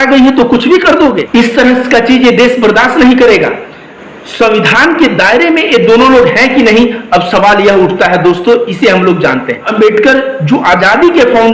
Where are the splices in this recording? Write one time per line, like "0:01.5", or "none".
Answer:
0:01.2
0:09.7